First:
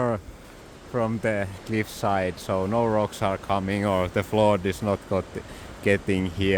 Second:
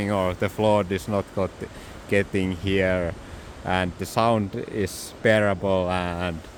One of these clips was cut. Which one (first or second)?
first